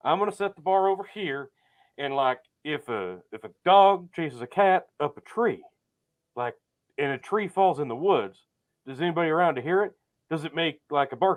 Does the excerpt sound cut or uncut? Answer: uncut